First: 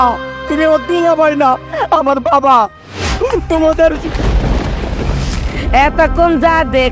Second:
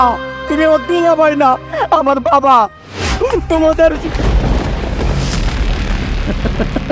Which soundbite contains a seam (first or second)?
first